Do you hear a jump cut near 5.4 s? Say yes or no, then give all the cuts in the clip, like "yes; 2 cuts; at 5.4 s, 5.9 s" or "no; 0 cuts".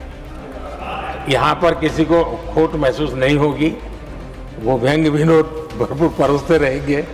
no; 0 cuts